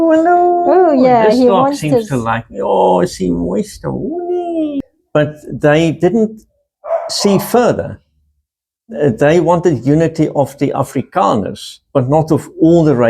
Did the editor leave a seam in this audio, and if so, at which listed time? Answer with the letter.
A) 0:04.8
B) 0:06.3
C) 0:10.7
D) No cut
A